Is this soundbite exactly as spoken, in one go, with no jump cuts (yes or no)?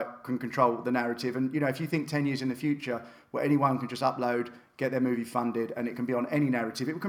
yes